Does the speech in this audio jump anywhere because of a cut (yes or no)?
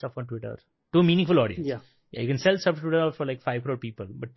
no